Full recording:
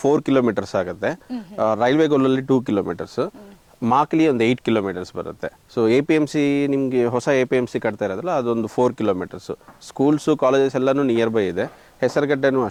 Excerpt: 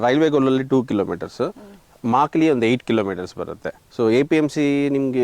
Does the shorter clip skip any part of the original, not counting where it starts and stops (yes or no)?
no